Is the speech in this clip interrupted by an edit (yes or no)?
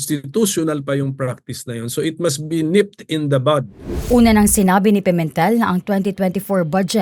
yes